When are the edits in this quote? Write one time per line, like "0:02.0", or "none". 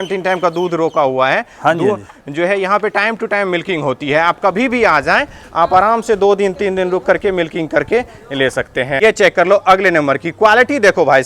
0:09.0